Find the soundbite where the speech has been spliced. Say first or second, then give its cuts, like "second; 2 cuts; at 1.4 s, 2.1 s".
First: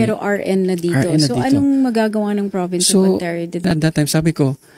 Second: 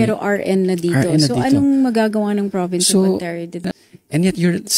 second; 1 cut; at 3.6 s